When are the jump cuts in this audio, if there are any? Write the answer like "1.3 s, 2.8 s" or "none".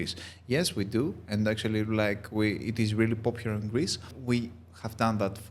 4.1 s